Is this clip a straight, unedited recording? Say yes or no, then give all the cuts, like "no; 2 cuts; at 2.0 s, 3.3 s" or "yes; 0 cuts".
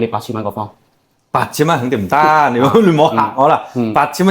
yes; 0 cuts